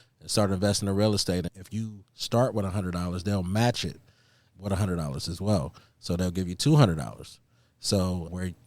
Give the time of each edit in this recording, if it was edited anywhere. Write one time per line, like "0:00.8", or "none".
0:01.6
0:04.6